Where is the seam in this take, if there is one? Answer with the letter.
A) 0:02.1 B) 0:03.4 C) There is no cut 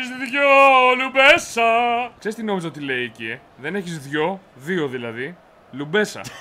A